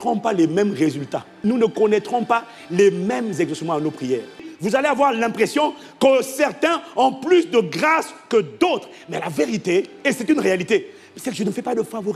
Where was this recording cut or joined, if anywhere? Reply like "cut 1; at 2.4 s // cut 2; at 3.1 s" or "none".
cut 1; at 1.3 s // cut 2; at 4.5 s